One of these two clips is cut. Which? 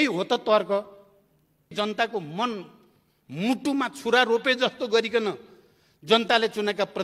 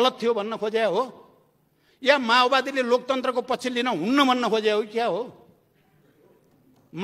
first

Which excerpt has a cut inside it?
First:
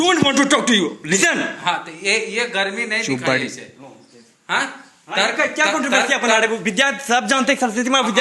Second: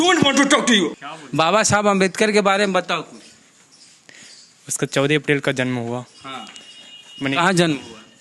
second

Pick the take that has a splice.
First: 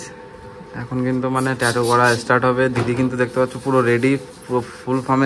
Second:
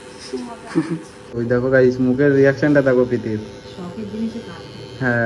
second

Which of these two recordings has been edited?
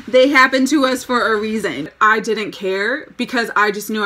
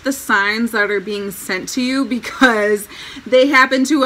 first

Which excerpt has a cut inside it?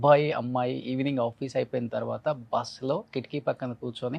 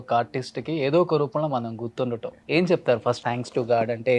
second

